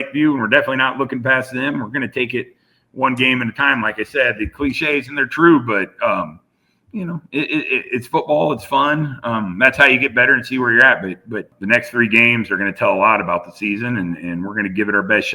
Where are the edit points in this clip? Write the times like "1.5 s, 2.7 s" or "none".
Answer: 11.5 s